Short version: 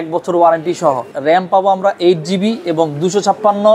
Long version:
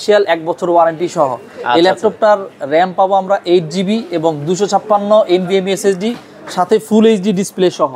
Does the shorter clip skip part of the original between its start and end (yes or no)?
yes